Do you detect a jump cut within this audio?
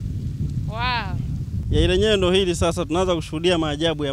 yes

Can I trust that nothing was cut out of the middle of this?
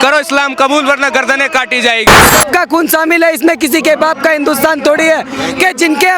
no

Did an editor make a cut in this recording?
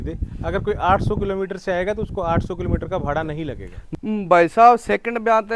yes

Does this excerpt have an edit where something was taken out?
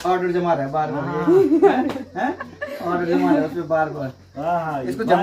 no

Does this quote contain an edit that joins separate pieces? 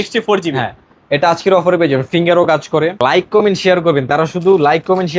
yes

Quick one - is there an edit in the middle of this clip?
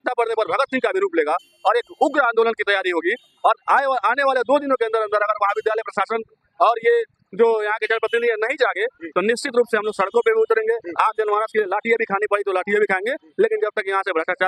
no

